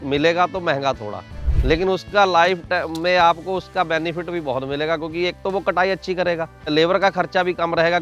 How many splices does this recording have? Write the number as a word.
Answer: one